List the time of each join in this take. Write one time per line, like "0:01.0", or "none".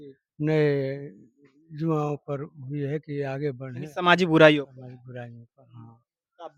none